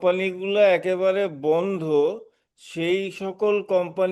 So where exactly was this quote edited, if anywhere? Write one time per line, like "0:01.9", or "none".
none